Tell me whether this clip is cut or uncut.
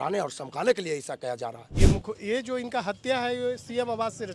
cut